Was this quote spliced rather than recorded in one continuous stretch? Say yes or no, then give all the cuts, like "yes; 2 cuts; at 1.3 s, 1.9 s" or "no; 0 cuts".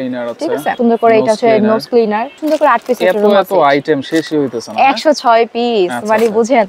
yes; 2 cuts; at 0.8 s, 2.3 s